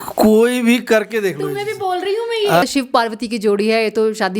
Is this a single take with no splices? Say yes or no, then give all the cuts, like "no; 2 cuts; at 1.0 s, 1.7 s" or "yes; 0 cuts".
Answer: no; 1 cut; at 2.6 s